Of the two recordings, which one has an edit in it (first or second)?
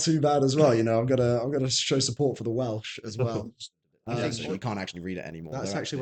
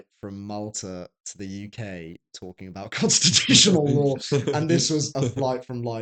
first